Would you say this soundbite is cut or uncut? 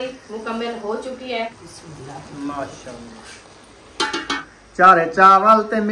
cut